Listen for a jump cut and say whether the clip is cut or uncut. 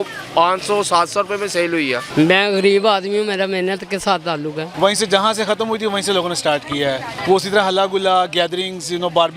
cut